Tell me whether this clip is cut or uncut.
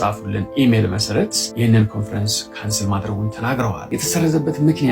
cut